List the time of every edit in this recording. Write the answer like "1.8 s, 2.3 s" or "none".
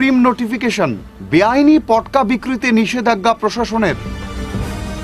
none